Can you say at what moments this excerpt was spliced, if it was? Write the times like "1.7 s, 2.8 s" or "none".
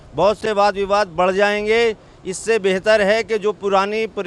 none